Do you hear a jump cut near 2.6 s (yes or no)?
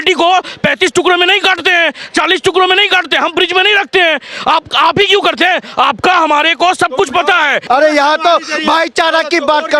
no